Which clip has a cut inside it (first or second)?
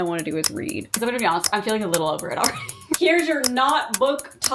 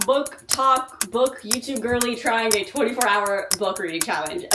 first